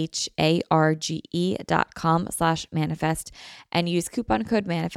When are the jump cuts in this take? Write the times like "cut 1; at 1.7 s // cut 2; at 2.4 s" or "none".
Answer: none

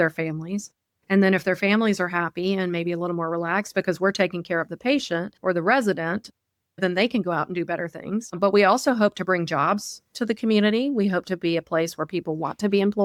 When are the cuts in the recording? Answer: none

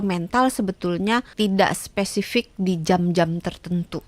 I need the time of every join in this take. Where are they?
cut 1; at 1.3 s

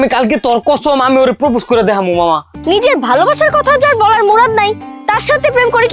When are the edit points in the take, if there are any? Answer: cut 1; at 2.5 s

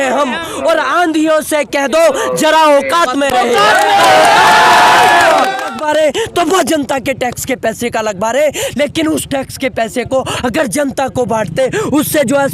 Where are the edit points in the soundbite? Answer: cut 1; at 5.7 s

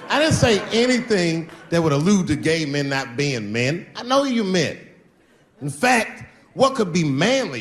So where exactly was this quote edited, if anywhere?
none

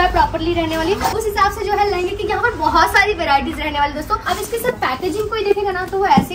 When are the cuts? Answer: cut 1; at 1.2 s // cut 2; at 4.2 s

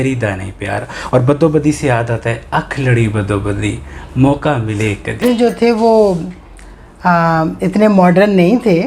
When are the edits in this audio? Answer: cut 1; at 5.2 s

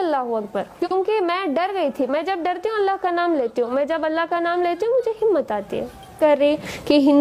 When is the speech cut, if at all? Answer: cut 1; at 6.2 s

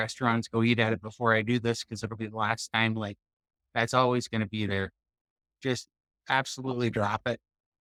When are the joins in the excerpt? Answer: none

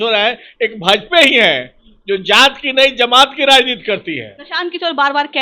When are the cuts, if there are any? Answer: cut 1; at 4.4 s

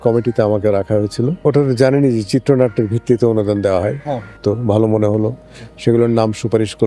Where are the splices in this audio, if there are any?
cut 1; at 1.4 s // cut 2; at 4.4 s

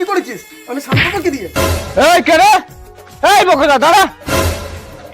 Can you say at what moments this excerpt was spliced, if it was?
cut 1; at 1.5 s

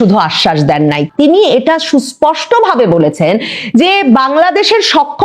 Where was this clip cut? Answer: cut 1; at 1.1 s

